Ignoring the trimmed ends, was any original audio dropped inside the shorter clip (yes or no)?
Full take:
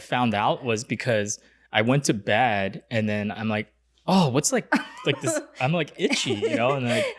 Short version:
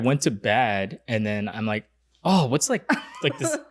no